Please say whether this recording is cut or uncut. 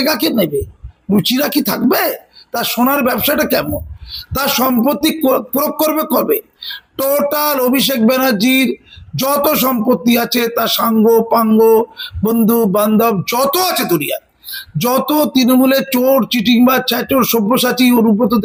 uncut